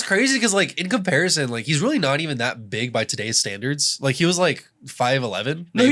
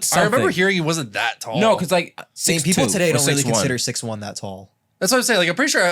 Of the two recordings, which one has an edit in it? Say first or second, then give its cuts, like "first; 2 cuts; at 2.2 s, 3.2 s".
second; 1 cut; at 2.4 s